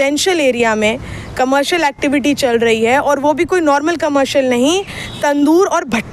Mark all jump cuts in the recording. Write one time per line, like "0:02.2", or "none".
none